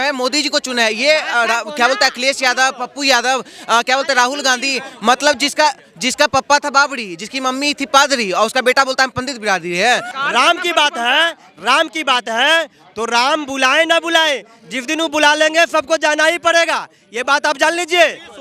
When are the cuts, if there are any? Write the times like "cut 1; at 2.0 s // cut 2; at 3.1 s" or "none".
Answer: cut 1; at 10.1 s